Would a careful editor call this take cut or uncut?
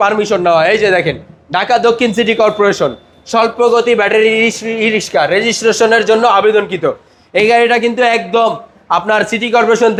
uncut